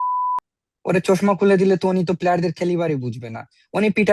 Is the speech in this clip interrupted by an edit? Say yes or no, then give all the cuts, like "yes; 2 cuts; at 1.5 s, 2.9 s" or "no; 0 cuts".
no; 0 cuts